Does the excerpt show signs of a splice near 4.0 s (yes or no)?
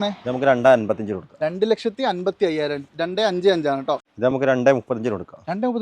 yes